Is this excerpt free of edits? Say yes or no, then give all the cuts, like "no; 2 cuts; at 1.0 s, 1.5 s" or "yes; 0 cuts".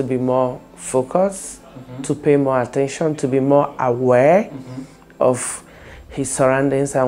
yes; 0 cuts